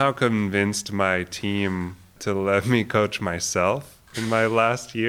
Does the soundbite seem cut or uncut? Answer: cut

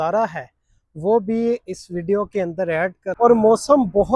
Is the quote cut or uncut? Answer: cut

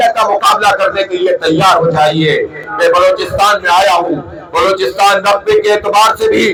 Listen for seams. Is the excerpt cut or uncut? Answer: uncut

